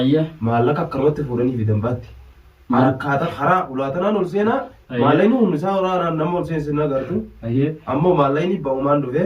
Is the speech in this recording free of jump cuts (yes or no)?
yes